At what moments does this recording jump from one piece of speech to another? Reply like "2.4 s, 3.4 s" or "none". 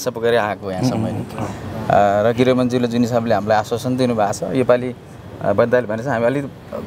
none